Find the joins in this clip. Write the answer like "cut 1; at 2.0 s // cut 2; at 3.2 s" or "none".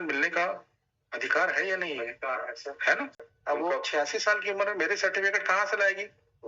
cut 1; at 3.2 s